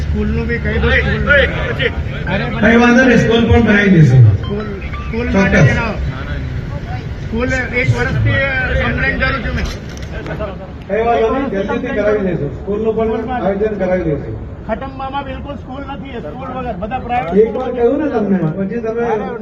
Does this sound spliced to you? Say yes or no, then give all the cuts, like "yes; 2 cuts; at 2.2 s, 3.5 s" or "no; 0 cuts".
no; 0 cuts